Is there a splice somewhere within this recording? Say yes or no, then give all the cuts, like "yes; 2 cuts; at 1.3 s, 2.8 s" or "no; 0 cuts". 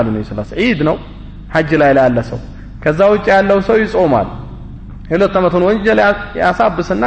no; 0 cuts